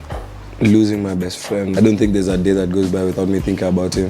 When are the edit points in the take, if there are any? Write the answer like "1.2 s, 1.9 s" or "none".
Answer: 1.7 s